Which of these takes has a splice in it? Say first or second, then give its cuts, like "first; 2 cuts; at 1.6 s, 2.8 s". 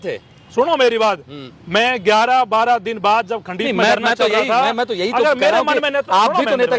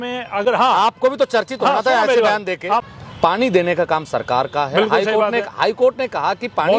second; 1 cut; at 2.9 s